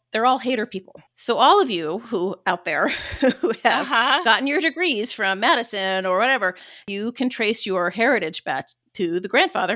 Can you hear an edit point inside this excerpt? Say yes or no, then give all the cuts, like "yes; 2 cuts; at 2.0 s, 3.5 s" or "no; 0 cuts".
yes; 1 cut; at 6.9 s